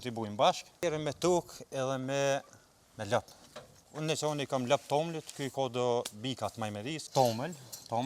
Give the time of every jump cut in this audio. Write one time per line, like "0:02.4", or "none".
0:00.8
0:07.0